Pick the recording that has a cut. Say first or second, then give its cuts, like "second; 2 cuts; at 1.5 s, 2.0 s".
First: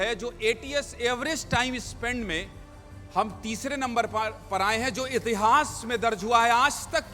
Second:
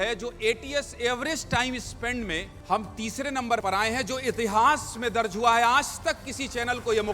second; 2 cuts; at 2.5 s, 3.6 s